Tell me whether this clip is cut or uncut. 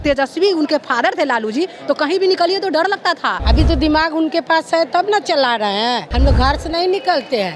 cut